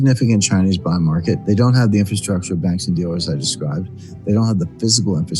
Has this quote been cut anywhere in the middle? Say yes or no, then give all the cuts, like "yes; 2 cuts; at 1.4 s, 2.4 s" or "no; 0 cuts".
yes; 1 cut; at 1.4 s